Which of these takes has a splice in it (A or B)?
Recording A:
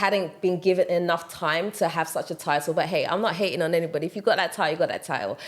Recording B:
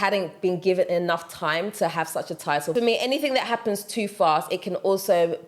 B